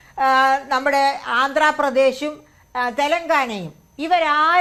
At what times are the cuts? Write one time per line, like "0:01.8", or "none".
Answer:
none